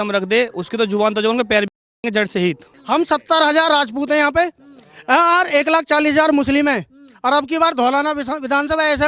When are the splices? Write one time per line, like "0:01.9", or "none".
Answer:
0:02.7